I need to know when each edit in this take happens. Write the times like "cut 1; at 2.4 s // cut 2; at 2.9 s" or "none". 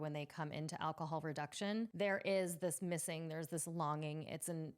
cut 1; at 1.9 s